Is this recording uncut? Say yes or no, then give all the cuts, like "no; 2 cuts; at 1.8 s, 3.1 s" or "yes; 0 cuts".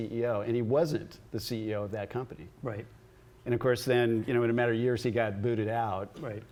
yes; 0 cuts